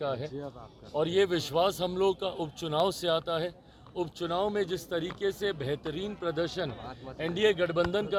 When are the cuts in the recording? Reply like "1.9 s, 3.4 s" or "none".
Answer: none